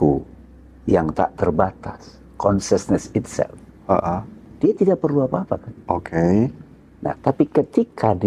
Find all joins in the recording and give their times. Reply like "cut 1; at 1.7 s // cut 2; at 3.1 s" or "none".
none